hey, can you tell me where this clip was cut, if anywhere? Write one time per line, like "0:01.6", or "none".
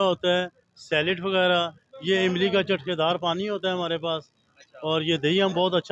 none